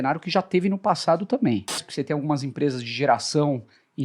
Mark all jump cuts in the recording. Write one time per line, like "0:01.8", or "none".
0:01.9